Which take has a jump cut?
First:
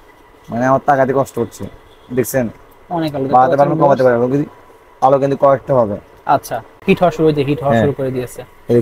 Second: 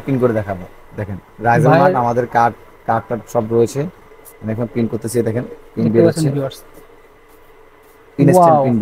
first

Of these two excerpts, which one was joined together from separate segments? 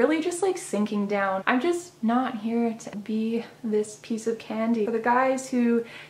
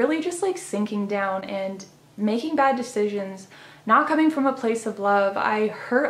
first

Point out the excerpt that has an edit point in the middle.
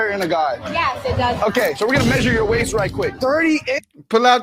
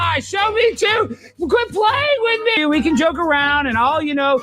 second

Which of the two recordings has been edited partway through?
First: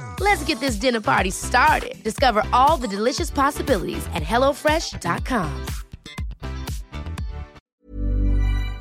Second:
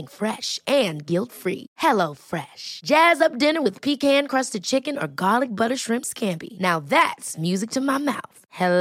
first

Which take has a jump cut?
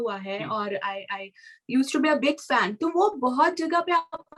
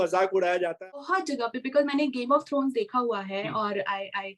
second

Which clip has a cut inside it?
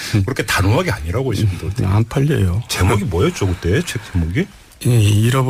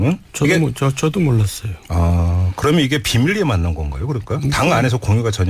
second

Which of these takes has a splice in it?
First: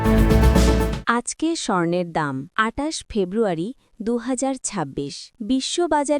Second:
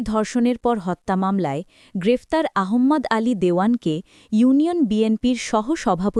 first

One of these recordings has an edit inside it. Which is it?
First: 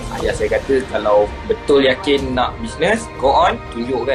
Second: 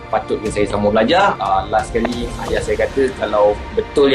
second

